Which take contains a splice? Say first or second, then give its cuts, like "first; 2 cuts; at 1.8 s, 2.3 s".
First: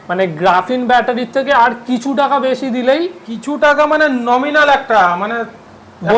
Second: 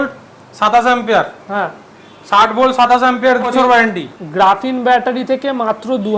second; 1 cut; at 3.5 s